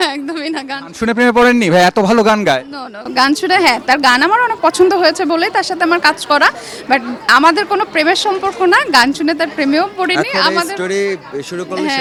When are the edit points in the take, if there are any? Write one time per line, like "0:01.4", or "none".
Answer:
none

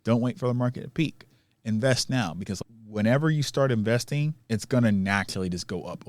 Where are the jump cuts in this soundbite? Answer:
0:02.5

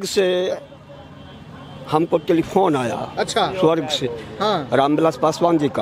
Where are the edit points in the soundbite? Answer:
none

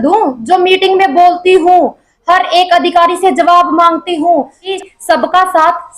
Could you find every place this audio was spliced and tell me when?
0:04.7

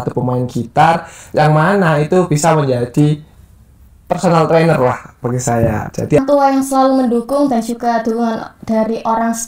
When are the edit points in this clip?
0:06.2

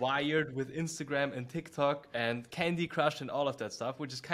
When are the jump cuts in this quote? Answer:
0:02.1

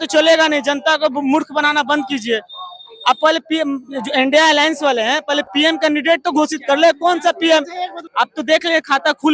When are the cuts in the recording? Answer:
0:08.0

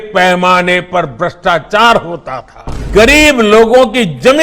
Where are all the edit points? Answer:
0:02.9

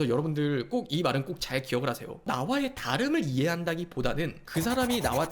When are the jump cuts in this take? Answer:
0:02.2

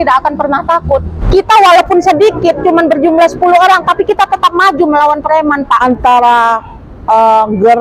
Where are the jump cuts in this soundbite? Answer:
0:01.1
0:05.8

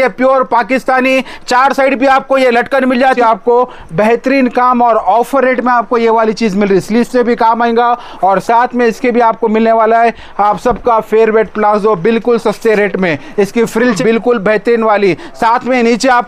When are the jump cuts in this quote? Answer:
0:03.2
0:14.0

